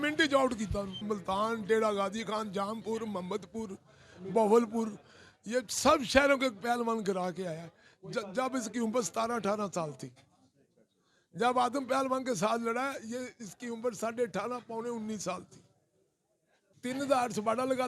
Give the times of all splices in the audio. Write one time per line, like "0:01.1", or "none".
0:01.0
0:16.7